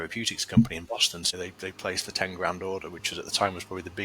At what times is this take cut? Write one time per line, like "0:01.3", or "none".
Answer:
0:01.2